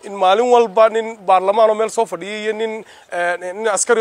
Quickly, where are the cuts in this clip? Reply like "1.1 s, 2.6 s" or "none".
none